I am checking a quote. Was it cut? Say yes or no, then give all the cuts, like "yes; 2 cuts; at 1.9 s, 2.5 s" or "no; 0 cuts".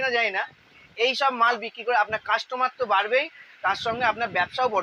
no; 0 cuts